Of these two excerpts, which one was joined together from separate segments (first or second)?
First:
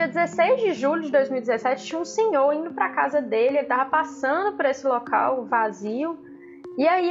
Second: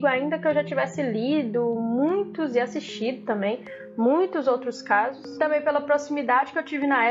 second